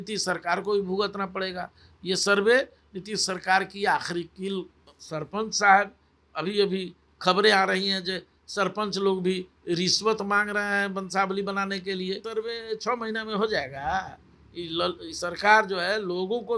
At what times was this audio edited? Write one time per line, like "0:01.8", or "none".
0:04.8
0:12.2